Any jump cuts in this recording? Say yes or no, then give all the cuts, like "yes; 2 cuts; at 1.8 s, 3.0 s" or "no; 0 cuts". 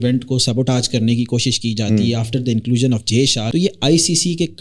yes; 1 cut; at 3.5 s